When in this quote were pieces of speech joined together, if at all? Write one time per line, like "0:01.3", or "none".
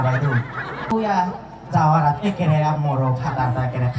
0:00.9